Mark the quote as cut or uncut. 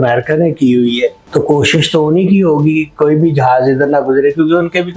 cut